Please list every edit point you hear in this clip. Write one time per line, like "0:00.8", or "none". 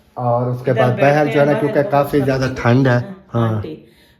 0:03.2